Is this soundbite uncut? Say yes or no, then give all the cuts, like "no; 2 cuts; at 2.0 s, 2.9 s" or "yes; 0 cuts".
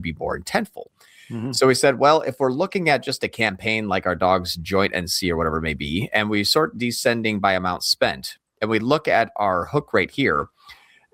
yes; 0 cuts